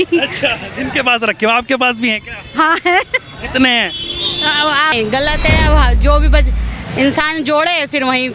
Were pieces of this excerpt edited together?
yes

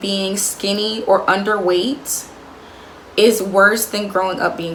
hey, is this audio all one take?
yes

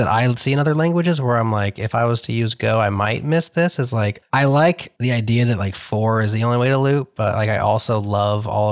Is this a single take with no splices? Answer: no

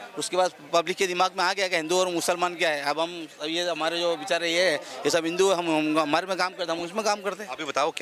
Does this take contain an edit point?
no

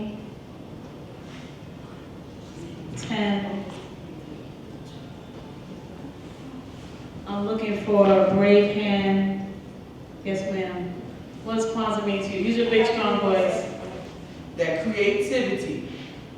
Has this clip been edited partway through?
yes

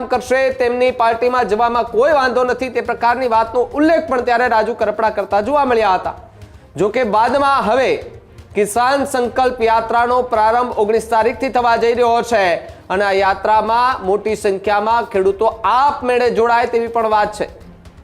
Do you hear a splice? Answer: no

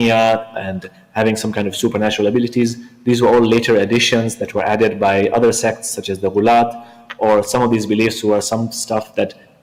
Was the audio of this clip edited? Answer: no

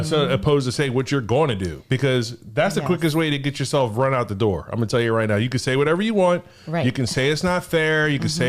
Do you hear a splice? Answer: no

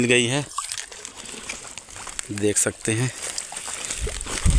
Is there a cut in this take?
no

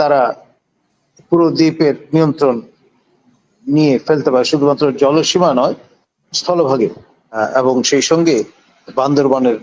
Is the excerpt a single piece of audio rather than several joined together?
no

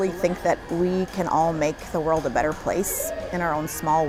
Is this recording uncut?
yes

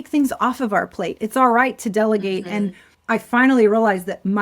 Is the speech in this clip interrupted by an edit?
yes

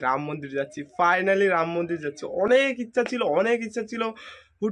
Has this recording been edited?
no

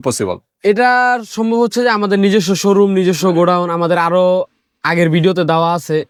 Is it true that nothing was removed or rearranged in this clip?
yes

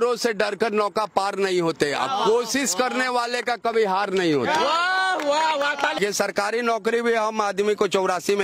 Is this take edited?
yes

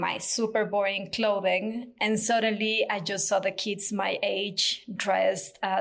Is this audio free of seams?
yes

